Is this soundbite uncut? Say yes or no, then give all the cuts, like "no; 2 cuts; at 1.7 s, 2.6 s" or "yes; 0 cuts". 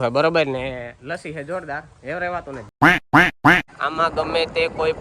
no; 2 cuts; at 2.7 s, 3.8 s